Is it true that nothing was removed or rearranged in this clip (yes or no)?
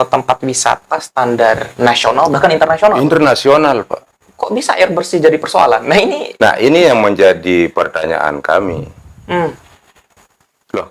yes